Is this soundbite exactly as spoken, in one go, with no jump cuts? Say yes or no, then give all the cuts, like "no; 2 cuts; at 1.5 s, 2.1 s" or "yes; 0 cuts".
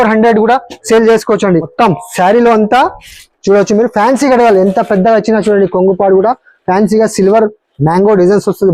no; 1 cut; at 1.7 s